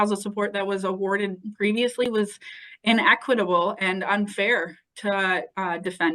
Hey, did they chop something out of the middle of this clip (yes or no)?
no